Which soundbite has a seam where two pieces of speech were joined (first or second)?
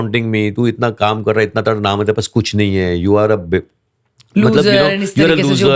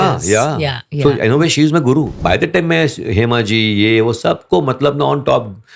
second